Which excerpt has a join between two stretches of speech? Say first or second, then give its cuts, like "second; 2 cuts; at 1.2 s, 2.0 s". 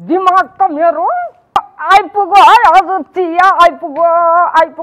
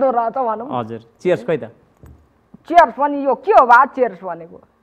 first; 1 cut; at 1.7 s